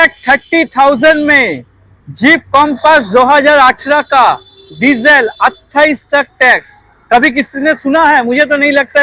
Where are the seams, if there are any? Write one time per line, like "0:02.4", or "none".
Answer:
none